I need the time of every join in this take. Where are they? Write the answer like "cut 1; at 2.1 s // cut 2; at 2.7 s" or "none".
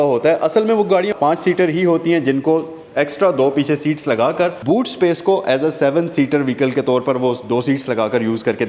none